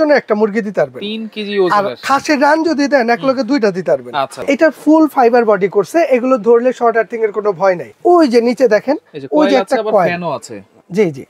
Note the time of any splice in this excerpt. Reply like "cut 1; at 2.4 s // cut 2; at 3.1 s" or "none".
cut 1; at 4.4 s // cut 2; at 7.9 s